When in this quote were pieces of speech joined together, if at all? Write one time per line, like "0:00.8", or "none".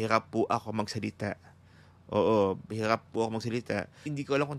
none